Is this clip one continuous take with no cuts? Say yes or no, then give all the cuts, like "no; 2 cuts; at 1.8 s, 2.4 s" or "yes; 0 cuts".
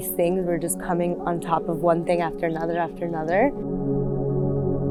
yes; 0 cuts